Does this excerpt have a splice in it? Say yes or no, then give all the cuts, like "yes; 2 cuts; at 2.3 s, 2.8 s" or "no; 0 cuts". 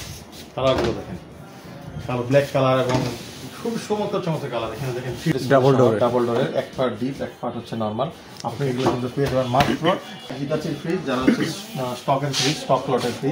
yes; 2 cuts; at 5.3 s, 10.3 s